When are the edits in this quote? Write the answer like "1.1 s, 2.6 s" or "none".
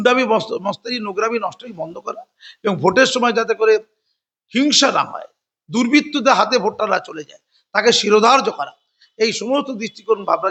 none